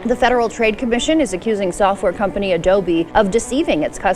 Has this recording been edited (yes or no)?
yes